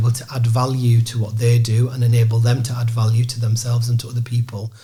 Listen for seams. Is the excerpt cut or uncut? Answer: uncut